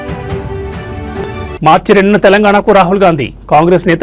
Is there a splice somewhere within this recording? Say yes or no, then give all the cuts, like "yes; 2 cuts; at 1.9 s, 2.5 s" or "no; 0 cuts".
no; 0 cuts